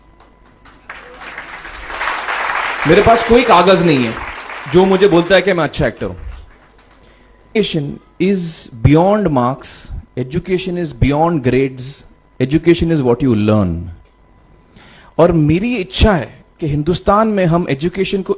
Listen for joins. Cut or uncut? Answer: cut